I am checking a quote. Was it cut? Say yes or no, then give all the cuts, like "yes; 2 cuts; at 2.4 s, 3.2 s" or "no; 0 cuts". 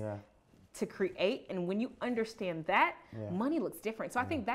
no; 0 cuts